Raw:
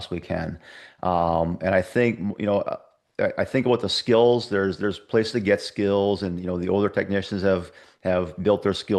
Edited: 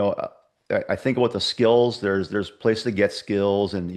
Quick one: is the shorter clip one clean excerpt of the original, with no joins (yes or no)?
yes